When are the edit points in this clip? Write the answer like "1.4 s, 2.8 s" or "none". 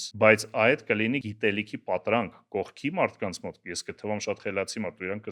1.3 s